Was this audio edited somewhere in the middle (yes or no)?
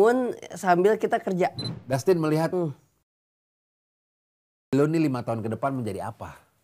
yes